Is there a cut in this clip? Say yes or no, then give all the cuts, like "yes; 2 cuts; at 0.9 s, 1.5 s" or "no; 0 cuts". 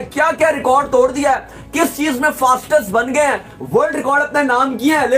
no; 0 cuts